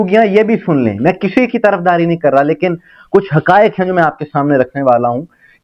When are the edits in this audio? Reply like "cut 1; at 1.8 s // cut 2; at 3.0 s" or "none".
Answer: none

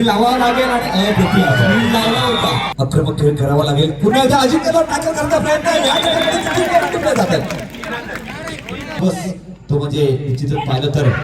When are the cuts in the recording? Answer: cut 1; at 2.7 s // cut 2; at 9.0 s

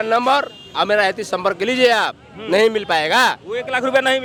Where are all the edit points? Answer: none

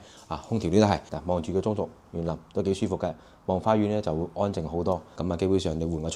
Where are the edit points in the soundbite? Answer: cut 1; at 1.1 s // cut 2; at 5.1 s

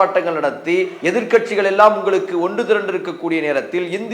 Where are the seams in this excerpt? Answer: cut 1; at 0.9 s

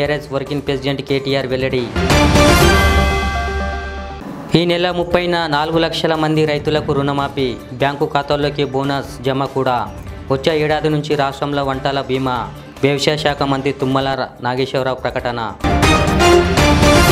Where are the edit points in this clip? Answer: none

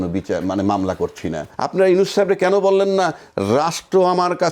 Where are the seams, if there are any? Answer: cut 1; at 1.5 s

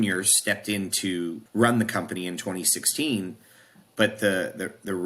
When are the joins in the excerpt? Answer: cut 1; at 1.4 s

